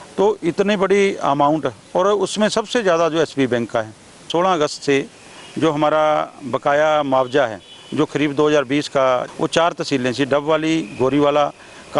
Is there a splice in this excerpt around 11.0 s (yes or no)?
no